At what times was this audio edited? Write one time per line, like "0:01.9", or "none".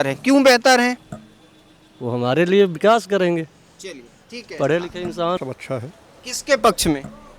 0:05.4